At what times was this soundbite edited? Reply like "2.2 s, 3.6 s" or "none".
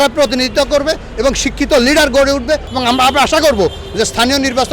2.7 s

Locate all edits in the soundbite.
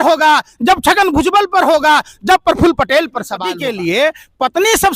3.6 s

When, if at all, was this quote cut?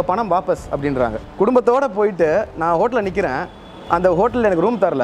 1.2 s

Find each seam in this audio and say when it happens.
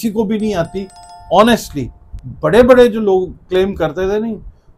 none

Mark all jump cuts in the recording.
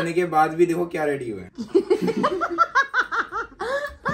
none

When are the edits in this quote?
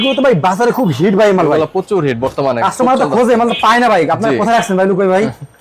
none

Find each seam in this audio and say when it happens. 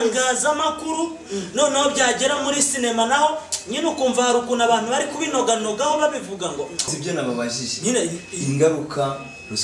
7.0 s

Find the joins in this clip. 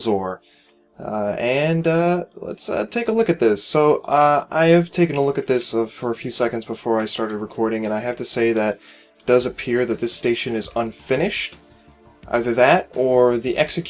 4.5 s

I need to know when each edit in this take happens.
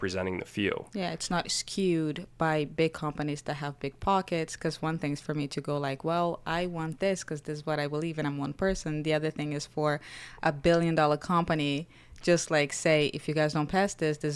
none

